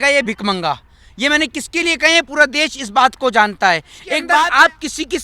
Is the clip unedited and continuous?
no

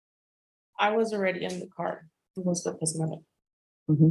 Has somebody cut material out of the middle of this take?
yes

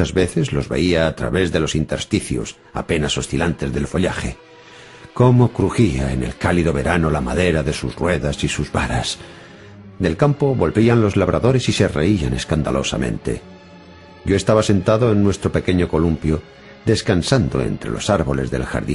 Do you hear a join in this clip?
yes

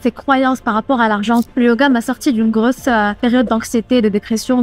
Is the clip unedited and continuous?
no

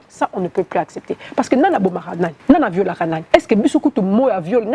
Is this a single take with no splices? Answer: no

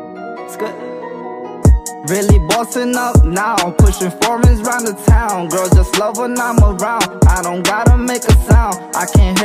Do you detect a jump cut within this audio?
no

